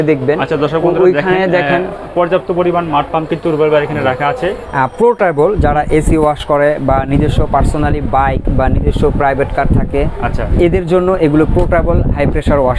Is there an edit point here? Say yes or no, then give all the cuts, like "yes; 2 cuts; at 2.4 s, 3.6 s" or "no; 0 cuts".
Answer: yes; 1 cut; at 4.6 s